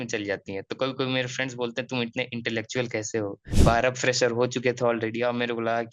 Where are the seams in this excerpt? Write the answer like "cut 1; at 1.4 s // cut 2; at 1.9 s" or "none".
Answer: cut 1; at 3.4 s